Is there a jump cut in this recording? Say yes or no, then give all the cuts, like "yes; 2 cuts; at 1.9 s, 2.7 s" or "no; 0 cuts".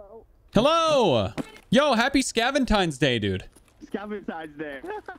no; 0 cuts